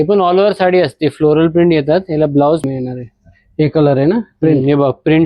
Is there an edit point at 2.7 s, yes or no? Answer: yes